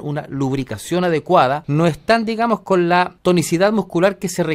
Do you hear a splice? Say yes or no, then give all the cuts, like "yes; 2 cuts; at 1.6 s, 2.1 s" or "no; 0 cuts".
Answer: yes; 2 cuts; at 1.6 s, 3.1 s